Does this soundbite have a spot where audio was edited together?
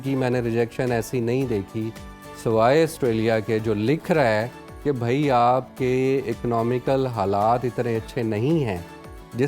no; 0 cuts

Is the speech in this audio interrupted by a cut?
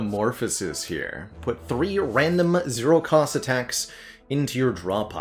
no; 0 cuts

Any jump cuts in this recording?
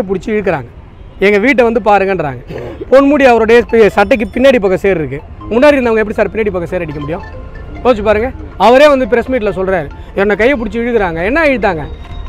no; 0 cuts

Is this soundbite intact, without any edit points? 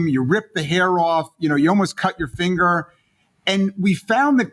yes; 0 cuts

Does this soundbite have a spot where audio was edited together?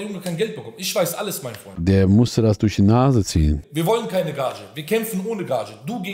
yes; 2 cuts; at 1.7 s, 3.6 s

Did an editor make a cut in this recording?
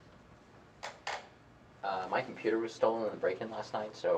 no; 0 cuts

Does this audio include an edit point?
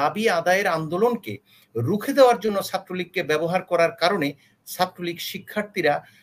no; 0 cuts

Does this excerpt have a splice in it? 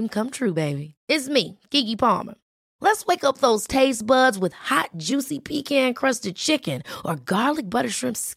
no; 0 cuts

